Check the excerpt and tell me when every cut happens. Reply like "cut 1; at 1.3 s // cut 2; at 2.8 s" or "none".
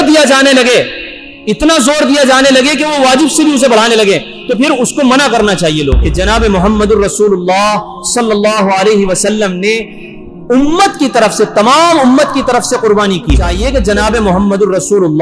cut 1; at 6.1 s // cut 2; at 13.5 s